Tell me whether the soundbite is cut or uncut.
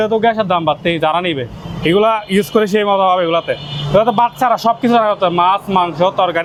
uncut